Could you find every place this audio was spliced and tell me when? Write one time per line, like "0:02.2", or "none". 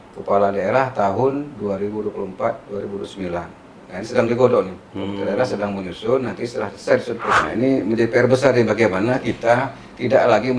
0:07.3